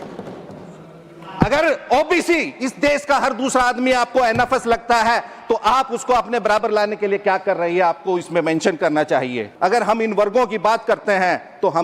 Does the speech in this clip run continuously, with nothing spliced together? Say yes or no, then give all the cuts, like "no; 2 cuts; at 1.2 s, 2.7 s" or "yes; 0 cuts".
no; 1 cut; at 9.5 s